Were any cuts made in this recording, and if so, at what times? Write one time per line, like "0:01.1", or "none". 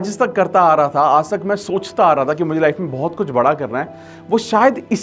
none